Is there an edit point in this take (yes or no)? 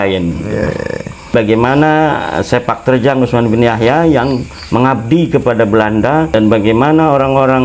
yes